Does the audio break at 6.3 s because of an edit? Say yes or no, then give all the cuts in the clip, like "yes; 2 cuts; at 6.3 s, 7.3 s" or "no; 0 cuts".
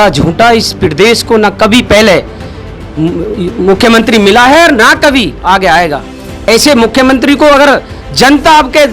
yes; 1 cut; at 6.3 s